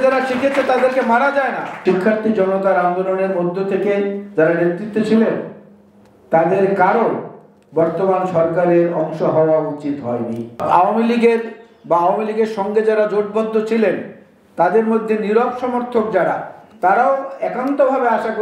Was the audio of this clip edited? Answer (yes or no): yes